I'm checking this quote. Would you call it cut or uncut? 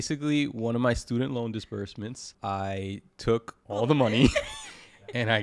cut